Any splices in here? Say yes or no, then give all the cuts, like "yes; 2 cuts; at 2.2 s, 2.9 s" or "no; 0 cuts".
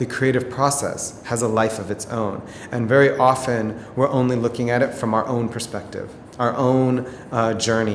no; 0 cuts